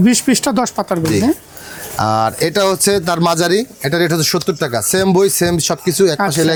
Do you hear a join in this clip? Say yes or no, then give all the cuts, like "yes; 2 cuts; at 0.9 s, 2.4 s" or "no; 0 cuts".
no; 0 cuts